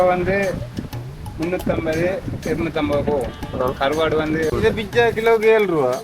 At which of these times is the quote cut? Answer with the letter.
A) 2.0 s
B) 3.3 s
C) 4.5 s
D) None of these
C